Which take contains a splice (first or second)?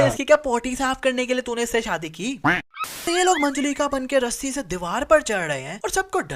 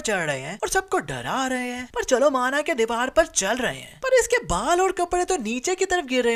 first